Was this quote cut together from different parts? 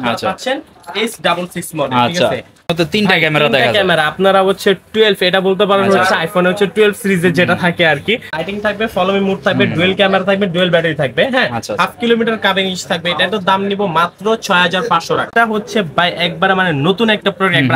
yes; 3 cuts; at 2.7 s, 8.3 s, 15.3 s

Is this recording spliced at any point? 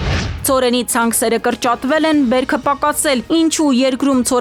no; 0 cuts

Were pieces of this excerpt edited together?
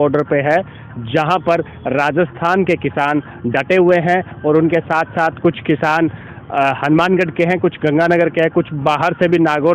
no; 0 cuts

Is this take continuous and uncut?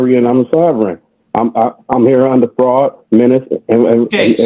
yes; 0 cuts

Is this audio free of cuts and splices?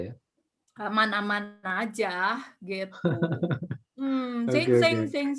yes; 0 cuts

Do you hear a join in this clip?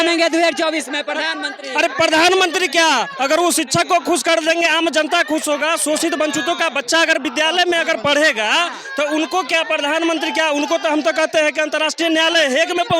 no; 0 cuts

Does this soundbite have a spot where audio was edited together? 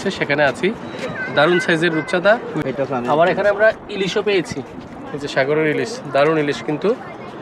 yes; 1 cut; at 2.7 s

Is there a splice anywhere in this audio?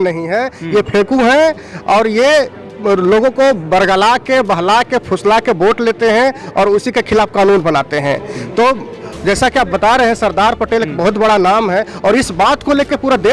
no; 0 cuts

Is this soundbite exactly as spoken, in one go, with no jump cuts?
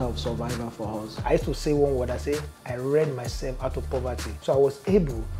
no; 2 cuts; at 1.1 s, 4.3 s

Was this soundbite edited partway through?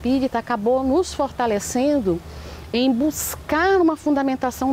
no; 0 cuts

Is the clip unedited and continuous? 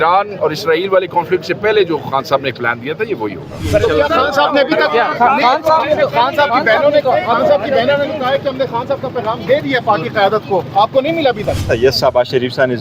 no; 2 cuts; at 3.6 s, 11.6 s

